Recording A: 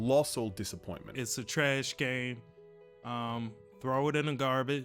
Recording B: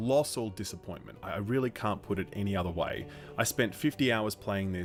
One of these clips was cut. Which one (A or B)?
A